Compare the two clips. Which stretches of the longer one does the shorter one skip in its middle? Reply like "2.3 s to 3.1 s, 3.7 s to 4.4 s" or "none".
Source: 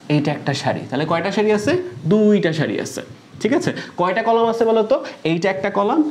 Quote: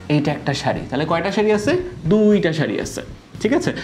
none